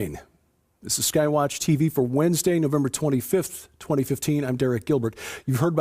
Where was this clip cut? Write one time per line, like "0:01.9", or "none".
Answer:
0:03.4